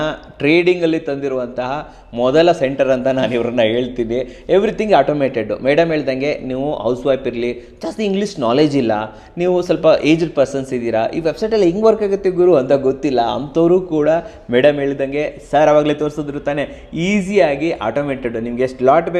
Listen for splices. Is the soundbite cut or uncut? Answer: uncut